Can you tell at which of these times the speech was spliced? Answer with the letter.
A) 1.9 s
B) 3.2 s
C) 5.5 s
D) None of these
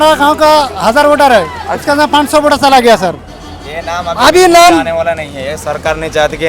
B